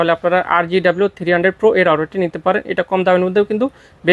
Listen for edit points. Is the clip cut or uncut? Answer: uncut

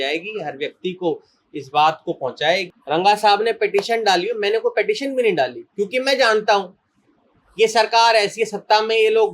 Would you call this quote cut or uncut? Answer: cut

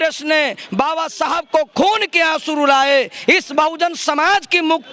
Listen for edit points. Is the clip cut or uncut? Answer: uncut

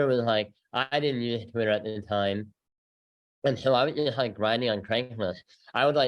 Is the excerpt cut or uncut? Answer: uncut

